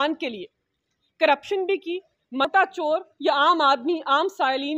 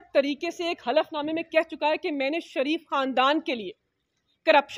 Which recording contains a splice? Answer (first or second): first